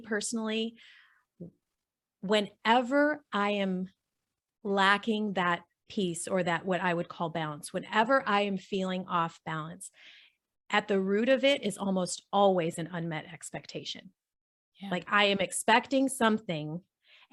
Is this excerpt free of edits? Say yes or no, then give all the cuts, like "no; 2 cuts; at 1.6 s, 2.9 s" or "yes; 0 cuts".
yes; 0 cuts